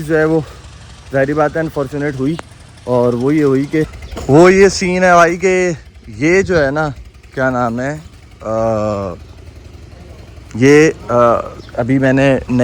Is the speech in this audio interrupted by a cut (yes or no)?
no